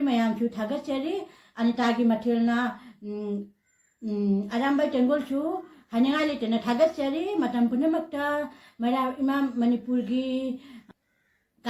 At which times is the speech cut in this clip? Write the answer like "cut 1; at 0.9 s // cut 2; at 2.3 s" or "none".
cut 1; at 10.8 s

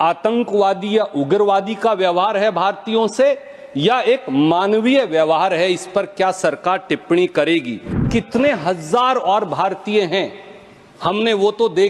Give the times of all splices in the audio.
cut 1; at 8.0 s

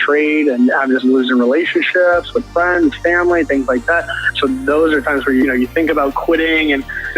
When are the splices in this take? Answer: cut 1; at 5.4 s

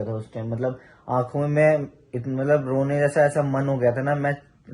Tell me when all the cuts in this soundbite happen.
none

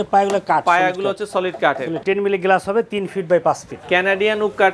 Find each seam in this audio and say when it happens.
cut 1; at 2.0 s // cut 2; at 3.7 s

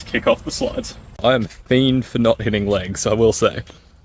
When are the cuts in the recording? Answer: cut 1; at 1.2 s

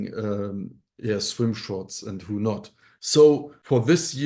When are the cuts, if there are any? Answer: cut 1; at 2.9 s

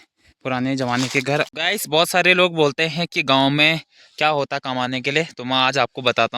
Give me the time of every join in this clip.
cut 1; at 1.5 s

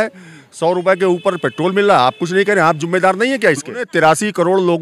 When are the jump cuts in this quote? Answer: cut 1; at 3.9 s

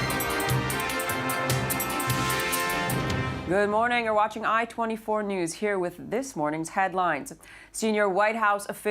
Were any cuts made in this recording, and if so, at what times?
cut 1; at 1.9 s

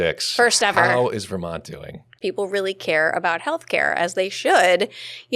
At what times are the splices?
cut 1; at 2.1 s

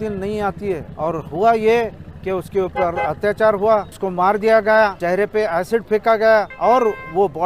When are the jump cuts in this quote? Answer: cut 1; at 0.9 s // cut 2; at 3.9 s // cut 3; at 5.0 s // cut 4; at 6.5 s

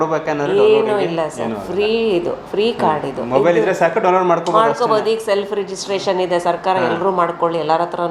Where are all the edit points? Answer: none

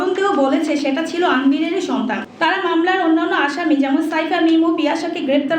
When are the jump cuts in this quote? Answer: cut 1; at 2.2 s

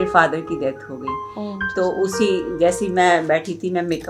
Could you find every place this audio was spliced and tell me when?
none

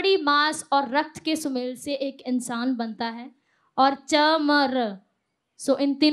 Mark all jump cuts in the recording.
none

